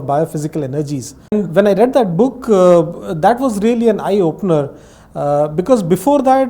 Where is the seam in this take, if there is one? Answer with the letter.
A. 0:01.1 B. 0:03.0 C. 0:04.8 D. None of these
A